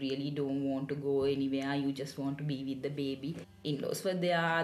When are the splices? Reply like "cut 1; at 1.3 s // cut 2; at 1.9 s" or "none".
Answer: cut 1; at 3.5 s